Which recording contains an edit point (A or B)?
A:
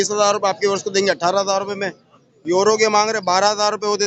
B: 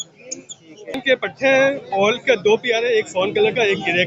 B